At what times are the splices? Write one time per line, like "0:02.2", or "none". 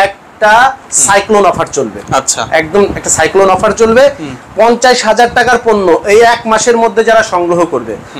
none